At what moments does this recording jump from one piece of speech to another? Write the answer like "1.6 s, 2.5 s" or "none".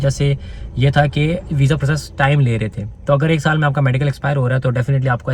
none